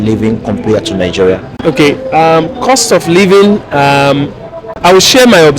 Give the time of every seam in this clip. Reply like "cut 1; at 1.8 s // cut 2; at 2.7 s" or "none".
cut 1; at 1.5 s